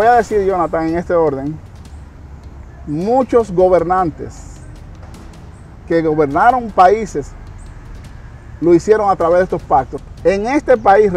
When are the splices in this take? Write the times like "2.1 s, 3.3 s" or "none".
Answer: 9.9 s

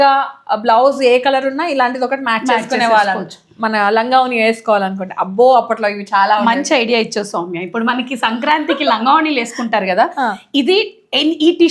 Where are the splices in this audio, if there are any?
none

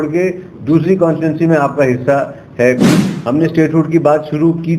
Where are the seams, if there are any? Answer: 3.1 s

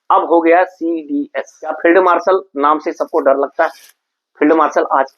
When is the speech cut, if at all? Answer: 1.8 s

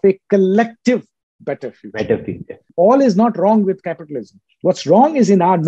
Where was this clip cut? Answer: 2.6 s

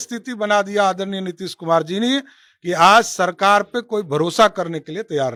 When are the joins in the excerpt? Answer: none

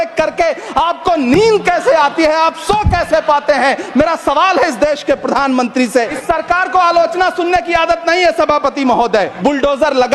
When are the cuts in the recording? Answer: 6.1 s, 9.3 s

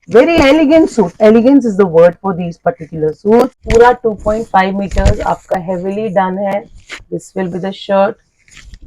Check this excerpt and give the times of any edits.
3.6 s

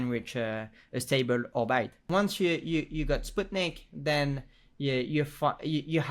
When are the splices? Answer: 2.0 s

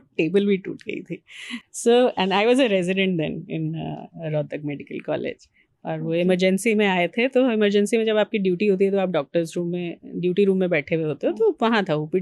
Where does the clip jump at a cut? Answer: none

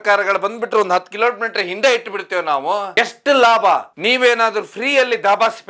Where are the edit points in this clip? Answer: 3.9 s

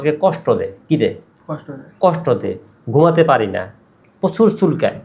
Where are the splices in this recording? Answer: none

